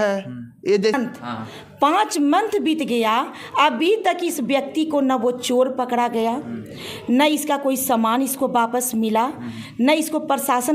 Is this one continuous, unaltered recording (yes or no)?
no